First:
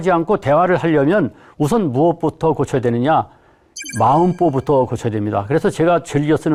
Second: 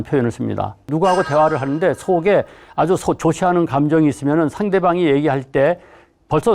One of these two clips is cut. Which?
second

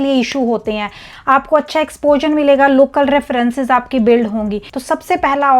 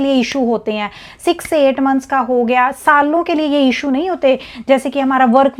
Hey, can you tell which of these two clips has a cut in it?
first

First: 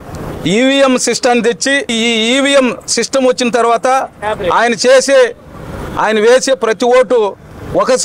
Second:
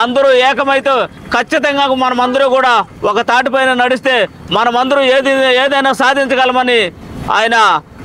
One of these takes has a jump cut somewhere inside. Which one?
first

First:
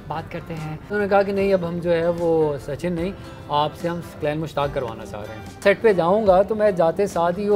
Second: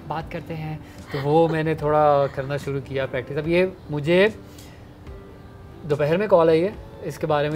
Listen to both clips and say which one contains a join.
first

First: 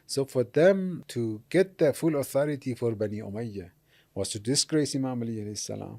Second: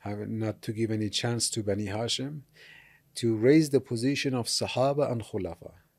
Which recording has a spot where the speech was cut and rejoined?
first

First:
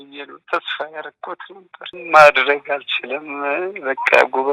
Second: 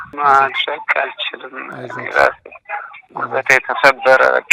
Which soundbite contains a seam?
first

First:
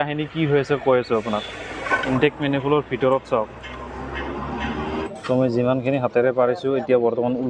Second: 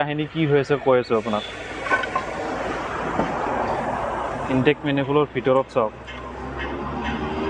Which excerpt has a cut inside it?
first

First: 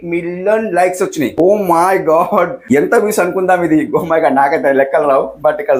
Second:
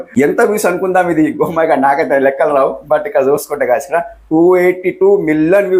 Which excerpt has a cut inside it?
first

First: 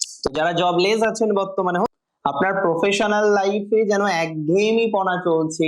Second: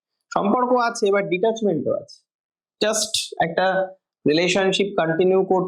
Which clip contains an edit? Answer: first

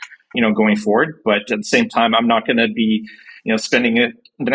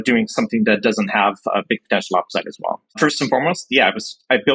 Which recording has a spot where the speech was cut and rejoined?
second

